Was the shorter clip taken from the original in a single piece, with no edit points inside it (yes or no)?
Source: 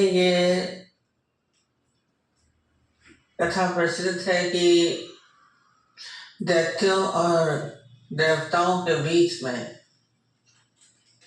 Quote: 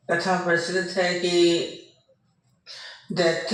yes